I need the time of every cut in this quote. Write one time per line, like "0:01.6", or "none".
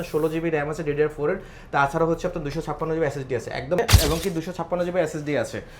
0:03.8